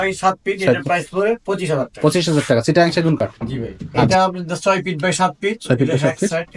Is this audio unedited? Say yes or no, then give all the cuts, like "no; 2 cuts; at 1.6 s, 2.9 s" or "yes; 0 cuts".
no; 1 cut; at 4.1 s